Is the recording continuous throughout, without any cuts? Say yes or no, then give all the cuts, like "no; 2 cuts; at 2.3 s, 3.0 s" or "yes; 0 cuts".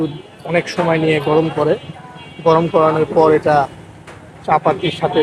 yes; 0 cuts